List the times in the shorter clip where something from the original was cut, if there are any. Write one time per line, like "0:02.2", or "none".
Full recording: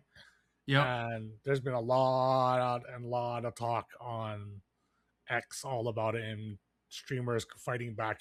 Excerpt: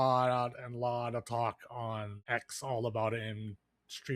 0:02.1